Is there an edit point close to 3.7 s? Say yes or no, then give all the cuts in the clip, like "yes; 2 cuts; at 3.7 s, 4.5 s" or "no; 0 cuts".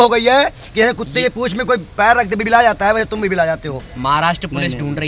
yes; 1 cut; at 3.7 s